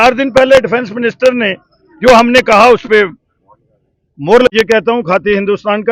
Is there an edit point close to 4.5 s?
yes; 1 cut; at 4.5 s

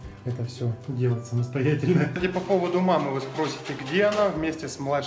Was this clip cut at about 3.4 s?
no; 1 cut; at 2.1 s

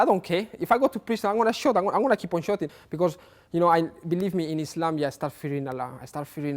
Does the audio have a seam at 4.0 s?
no; 1 cut; at 2.8 s

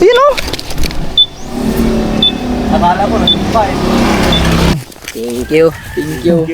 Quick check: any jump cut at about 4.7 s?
yes; 1 cut; at 4.7 s

